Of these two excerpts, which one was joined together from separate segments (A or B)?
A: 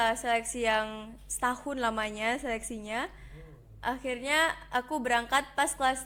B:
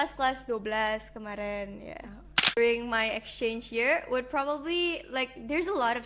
B